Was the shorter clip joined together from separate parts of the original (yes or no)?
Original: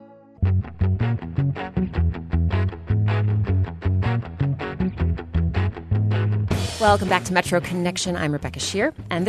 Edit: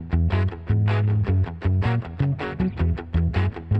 no